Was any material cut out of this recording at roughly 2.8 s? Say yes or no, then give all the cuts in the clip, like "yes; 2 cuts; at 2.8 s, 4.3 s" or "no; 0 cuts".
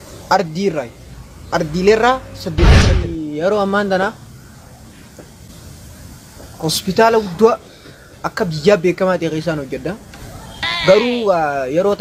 yes; 1 cut; at 2.8 s